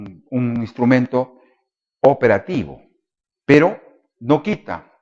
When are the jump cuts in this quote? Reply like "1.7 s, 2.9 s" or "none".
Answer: 2.6 s